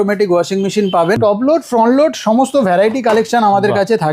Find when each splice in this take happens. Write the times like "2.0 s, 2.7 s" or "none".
1.2 s